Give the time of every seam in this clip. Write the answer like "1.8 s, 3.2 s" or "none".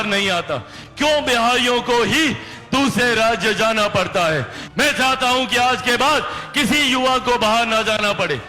4.6 s